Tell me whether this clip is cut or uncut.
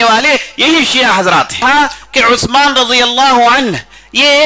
cut